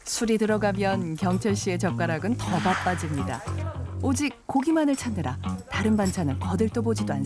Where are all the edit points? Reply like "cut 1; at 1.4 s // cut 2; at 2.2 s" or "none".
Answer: none